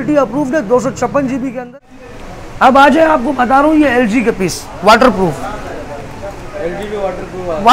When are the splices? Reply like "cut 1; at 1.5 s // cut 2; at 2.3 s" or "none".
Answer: cut 1; at 1.6 s